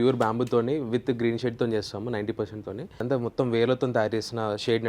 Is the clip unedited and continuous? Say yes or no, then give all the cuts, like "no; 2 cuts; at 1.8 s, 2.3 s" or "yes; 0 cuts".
no; 1 cut; at 3.0 s